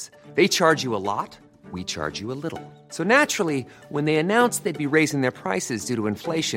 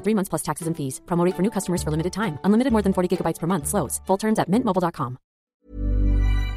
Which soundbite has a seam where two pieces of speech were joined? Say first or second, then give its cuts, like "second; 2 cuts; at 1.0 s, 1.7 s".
second; 1 cut; at 5.6 s